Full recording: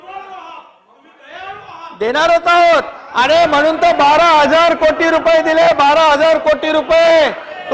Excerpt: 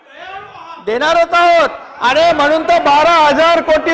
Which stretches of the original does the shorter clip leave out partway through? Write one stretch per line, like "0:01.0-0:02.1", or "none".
none